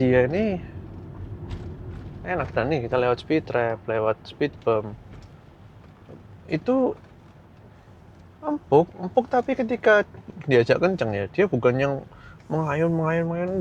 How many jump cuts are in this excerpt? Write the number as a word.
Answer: zero